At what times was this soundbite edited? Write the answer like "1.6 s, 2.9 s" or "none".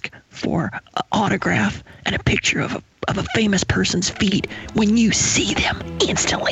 none